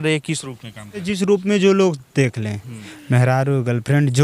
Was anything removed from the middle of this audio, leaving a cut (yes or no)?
yes